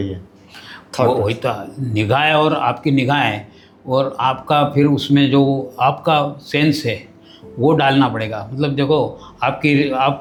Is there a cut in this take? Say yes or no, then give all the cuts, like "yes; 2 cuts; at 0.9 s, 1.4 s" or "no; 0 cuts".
no; 0 cuts